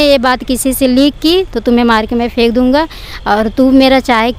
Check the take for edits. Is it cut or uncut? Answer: uncut